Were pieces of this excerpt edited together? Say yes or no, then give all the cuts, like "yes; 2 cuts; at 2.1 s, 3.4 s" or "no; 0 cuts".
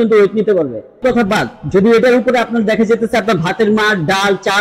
yes; 1 cut; at 1.0 s